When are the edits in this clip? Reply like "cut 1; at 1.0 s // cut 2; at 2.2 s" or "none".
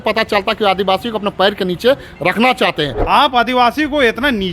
cut 1; at 2.9 s

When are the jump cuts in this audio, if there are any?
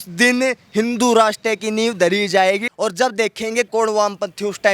cut 1; at 2.7 s // cut 2; at 3.7 s

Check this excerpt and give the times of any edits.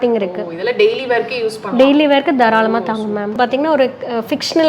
cut 1; at 3.3 s

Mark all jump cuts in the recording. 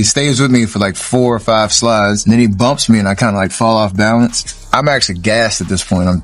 cut 1; at 2.2 s // cut 2; at 4.7 s

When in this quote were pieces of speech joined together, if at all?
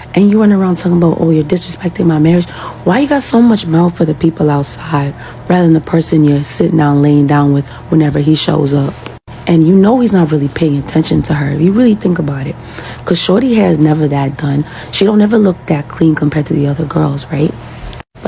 none

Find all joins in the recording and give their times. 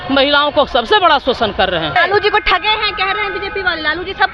cut 1; at 1.9 s

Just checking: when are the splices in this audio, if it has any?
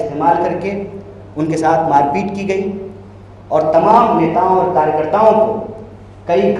none

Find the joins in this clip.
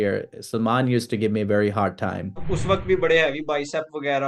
cut 1; at 2.5 s

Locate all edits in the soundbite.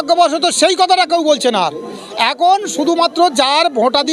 none

